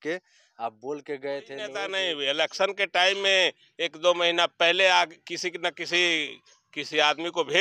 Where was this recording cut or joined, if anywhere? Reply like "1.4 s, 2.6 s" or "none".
1.8 s